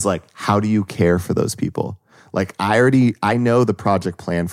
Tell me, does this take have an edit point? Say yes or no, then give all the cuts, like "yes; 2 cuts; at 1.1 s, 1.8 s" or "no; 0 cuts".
no; 0 cuts